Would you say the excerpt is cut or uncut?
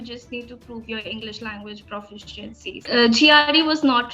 cut